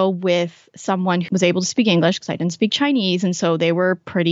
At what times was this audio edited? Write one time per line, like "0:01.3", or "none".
none